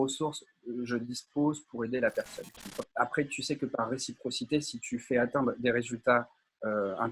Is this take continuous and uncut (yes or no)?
no